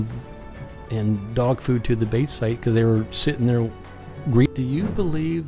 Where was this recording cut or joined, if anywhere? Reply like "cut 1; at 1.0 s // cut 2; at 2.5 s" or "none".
cut 1; at 4.5 s